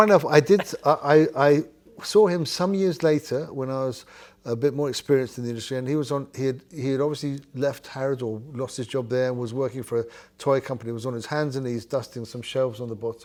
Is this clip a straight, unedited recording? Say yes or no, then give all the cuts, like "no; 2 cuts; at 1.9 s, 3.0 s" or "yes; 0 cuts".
yes; 0 cuts